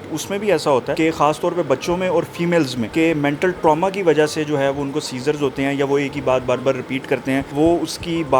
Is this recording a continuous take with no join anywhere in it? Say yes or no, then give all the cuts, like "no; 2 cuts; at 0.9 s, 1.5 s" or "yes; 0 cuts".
no; 3 cuts; at 0.9 s, 2.8 s, 7.5 s